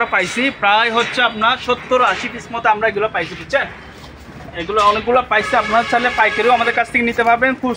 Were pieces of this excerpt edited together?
no; 0 cuts

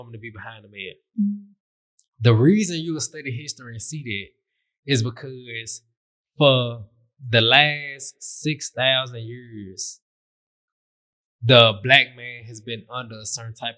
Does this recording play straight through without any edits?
yes; 0 cuts

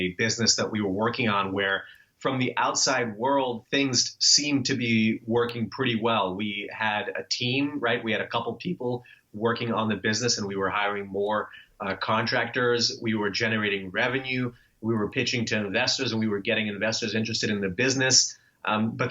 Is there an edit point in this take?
yes; 1 cut; at 3.6 s

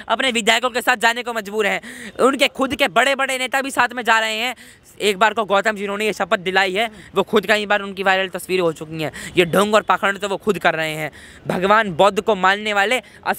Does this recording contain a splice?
no; 0 cuts

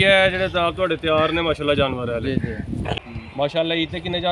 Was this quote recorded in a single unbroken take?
no; 1 cut; at 3.1 s

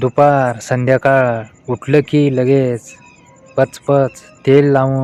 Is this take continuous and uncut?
yes; 0 cuts

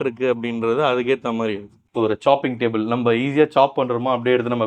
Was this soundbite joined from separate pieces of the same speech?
yes; 1 cut; at 1.9 s

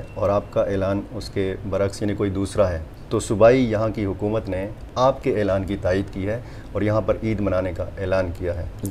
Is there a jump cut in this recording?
no; 0 cuts

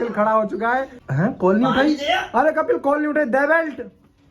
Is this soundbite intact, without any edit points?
no; 1 cut; at 1.0 s

